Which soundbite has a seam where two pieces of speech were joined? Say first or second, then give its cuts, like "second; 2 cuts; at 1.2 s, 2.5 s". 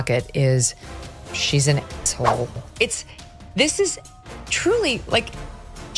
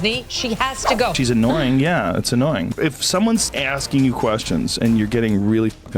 second; 1 cut; at 1.2 s